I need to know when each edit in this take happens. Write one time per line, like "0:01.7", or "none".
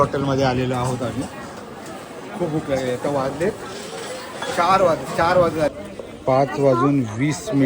0:05.8